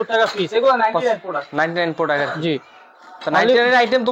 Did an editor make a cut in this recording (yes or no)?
no